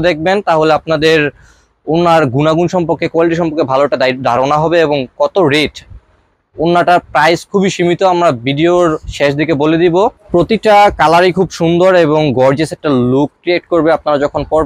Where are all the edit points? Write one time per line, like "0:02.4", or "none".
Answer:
0:10.2